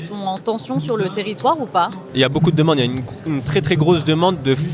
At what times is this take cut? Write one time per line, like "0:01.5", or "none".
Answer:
0:02.1